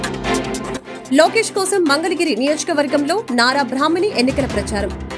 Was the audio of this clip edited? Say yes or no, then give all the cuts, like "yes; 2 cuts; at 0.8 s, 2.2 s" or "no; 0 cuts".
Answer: yes; 1 cut; at 0.9 s